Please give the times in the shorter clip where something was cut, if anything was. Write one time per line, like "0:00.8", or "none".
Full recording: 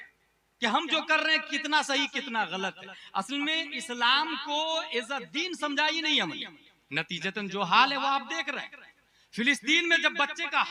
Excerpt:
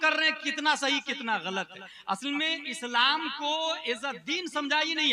none